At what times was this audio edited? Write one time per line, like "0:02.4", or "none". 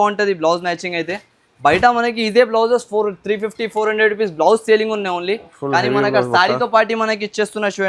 none